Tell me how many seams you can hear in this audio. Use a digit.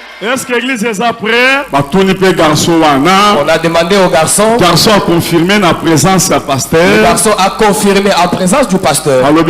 1